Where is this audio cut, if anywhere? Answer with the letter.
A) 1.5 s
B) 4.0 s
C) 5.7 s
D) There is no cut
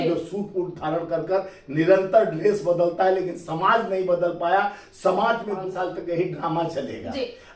C